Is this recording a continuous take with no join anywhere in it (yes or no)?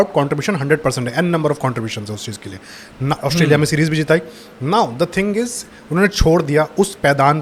yes